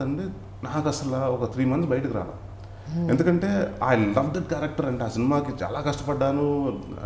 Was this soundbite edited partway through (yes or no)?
no